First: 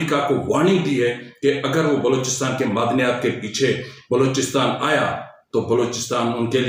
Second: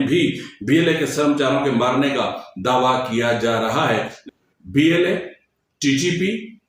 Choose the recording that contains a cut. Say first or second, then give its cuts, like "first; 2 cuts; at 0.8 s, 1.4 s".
second; 1 cut; at 4.1 s